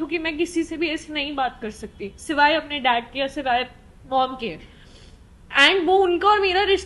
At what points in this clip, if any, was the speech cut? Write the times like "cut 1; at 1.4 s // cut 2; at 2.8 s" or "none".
none